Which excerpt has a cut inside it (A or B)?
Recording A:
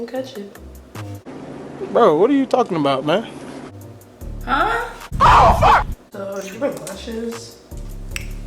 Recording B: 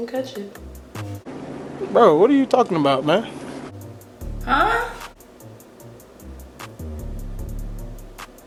A